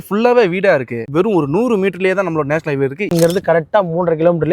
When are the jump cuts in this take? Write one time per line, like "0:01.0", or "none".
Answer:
0:01.0
0:03.1